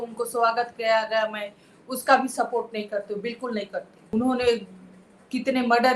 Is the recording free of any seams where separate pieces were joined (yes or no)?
no